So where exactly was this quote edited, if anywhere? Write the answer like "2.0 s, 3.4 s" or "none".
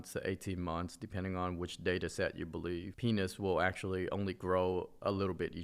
2.9 s

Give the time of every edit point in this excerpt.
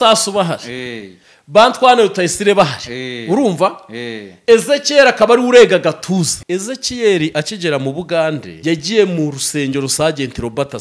6.4 s, 8.5 s

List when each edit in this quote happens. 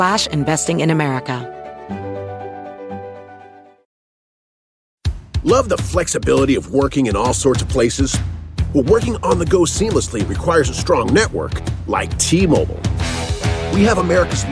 1.4 s

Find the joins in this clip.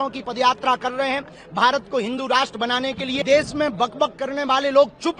3.2 s

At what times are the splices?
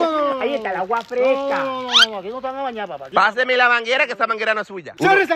3.1 s

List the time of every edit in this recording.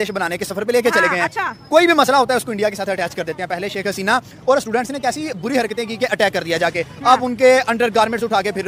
none

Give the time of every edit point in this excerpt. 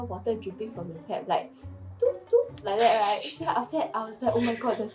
none

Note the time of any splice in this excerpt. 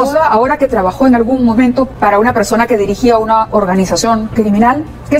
1.9 s

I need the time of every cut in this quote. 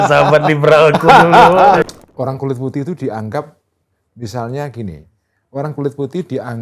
1.8 s

